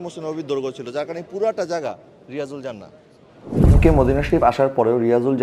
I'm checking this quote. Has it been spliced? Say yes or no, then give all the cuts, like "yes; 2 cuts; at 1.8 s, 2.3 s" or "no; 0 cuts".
yes; 1 cut; at 3.6 s